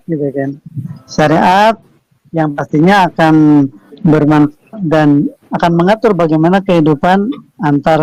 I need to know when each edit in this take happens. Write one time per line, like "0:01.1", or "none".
none